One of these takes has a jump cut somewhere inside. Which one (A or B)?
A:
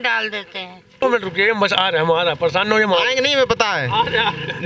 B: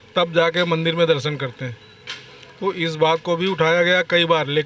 A